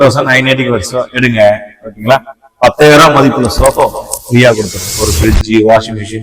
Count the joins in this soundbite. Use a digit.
1